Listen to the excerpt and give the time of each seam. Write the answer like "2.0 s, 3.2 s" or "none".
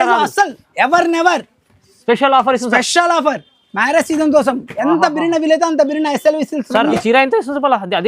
7.0 s